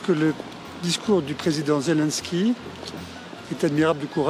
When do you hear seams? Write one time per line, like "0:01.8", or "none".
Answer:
none